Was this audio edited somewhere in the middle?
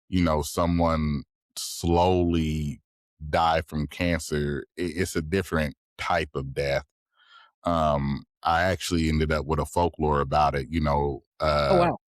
no; 0 cuts

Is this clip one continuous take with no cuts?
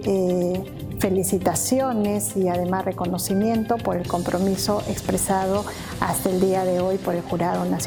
yes; 0 cuts

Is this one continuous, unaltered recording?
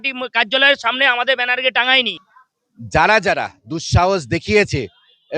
no; 1 cut; at 2.1 s

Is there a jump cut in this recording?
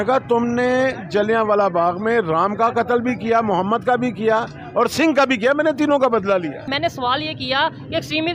yes; 1 cut; at 6.7 s

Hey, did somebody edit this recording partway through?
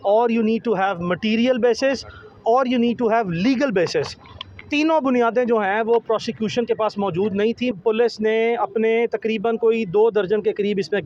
yes; 1 cut; at 7.7 s

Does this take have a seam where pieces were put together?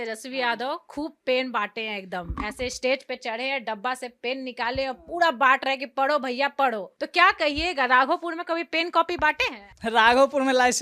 no; 0 cuts

